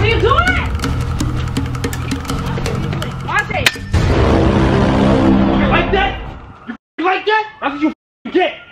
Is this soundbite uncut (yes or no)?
no